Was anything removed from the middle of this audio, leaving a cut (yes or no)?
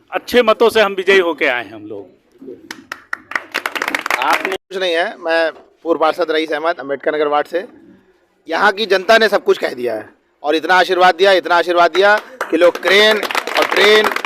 yes